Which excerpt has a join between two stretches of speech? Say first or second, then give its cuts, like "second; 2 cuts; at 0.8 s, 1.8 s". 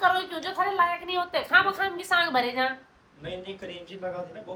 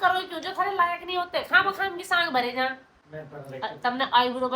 second; 1 cut; at 3.0 s